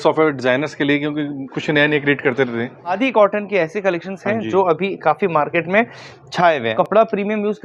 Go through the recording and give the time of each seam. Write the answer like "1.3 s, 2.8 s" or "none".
3.0 s, 6.7 s